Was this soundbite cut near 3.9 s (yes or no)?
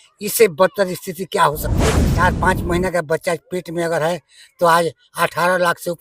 no